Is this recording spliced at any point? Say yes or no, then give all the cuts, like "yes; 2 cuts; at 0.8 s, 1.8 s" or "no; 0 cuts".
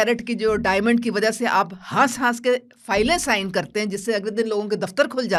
no; 0 cuts